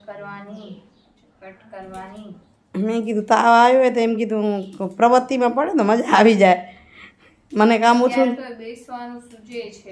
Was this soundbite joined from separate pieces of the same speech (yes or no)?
no